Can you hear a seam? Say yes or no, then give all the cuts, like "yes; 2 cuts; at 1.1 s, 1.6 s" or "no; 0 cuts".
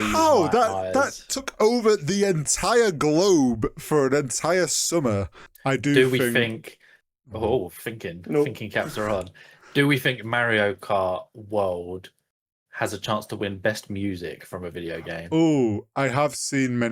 yes; 1 cut; at 5.4 s